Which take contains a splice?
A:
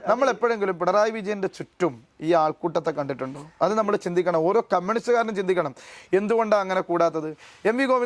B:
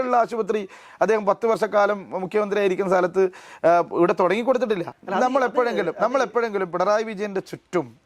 B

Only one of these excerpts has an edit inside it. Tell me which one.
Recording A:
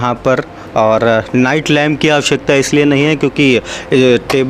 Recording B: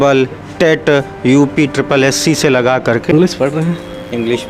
B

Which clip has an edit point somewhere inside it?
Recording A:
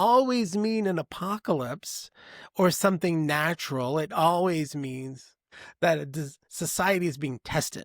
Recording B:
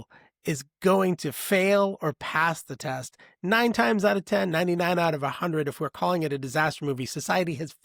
A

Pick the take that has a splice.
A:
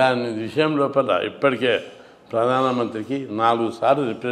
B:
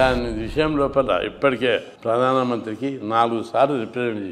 B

